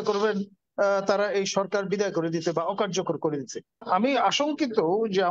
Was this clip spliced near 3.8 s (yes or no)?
yes